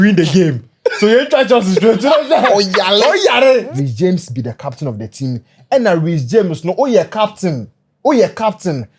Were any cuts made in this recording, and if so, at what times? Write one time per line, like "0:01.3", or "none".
0:03.7